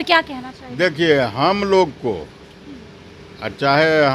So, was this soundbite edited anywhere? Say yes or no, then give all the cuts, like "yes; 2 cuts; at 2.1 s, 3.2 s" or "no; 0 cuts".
no; 0 cuts